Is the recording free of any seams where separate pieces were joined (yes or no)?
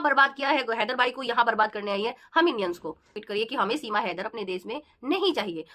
no